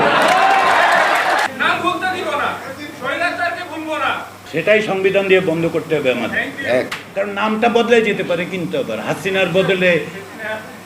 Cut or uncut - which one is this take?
cut